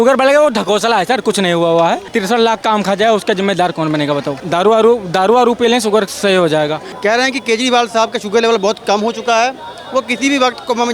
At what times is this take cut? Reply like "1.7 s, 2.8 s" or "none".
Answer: 2.1 s, 4.4 s, 6.9 s

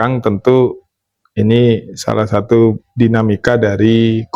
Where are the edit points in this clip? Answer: none

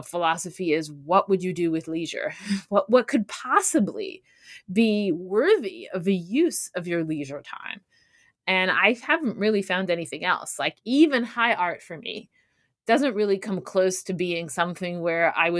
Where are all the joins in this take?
none

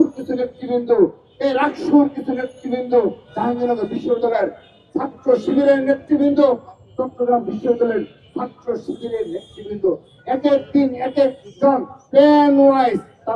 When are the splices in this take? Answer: none

